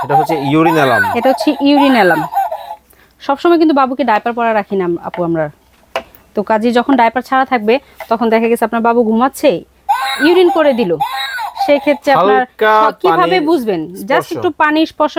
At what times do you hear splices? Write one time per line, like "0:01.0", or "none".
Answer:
none

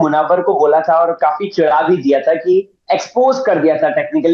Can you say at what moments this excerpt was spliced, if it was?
none

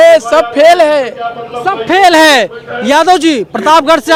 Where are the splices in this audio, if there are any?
none

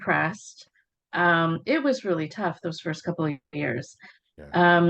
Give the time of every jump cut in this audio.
none

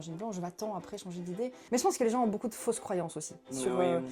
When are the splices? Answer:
0:01.6

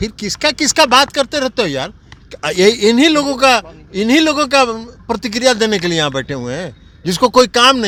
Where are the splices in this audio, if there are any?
none

